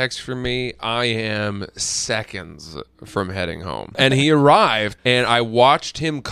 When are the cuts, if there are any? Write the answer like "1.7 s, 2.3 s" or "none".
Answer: 4.0 s, 4.9 s